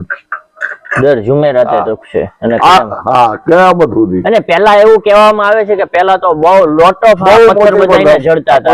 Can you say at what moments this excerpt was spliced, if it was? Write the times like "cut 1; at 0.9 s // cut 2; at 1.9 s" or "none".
none